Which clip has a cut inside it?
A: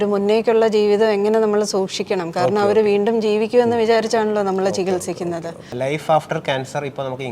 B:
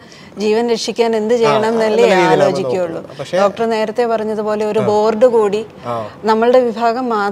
A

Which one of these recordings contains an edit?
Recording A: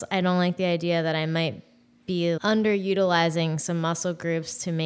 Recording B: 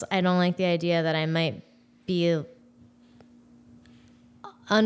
A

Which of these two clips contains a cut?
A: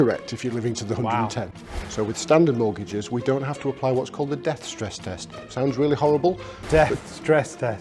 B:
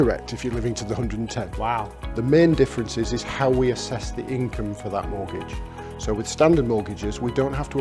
A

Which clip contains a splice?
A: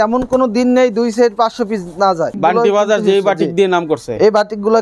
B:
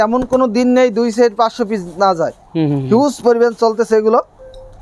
A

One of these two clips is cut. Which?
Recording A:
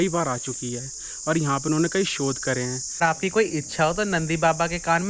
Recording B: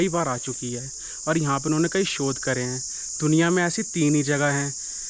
A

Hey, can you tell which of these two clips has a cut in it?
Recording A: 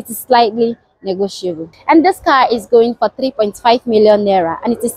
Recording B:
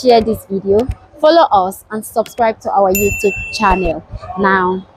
A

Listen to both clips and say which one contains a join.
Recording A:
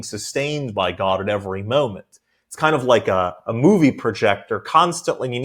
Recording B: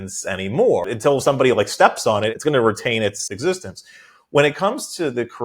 B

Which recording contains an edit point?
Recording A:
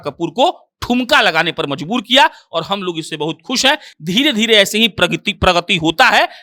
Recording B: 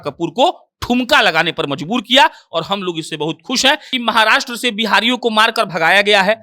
B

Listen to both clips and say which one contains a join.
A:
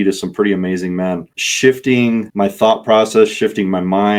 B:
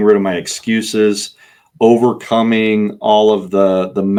A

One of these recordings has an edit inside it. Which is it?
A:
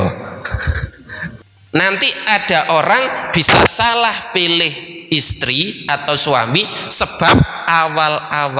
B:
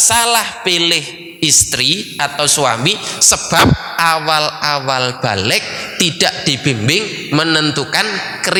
A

